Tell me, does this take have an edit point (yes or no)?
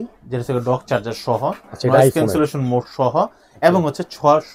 no